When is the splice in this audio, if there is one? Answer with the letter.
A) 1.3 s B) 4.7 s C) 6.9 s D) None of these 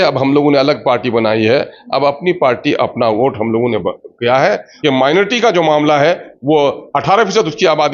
B